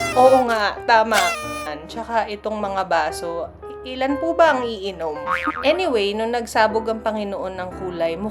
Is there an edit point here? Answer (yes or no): yes